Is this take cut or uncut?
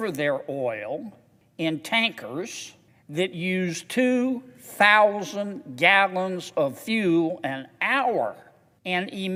uncut